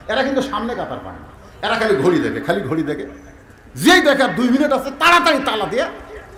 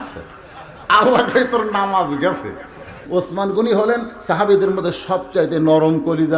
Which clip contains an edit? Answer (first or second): second